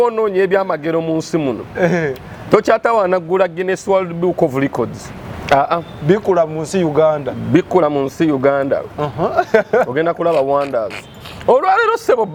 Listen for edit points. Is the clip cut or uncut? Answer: uncut